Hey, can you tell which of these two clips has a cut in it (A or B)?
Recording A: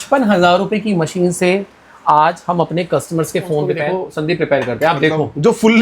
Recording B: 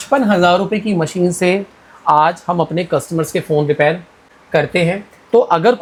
A